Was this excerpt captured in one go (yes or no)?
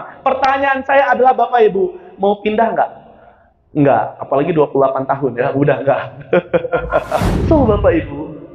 no